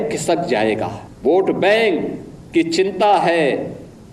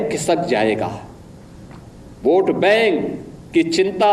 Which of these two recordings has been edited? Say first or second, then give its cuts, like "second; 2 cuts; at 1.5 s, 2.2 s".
first; 1 cut; at 1.0 s